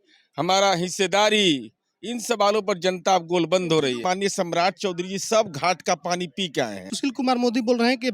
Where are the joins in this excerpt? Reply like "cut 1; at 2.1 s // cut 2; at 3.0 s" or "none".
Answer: cut 1; at 4.0 s // cut 2; at 6.9 s